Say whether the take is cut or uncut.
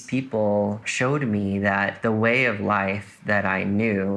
cut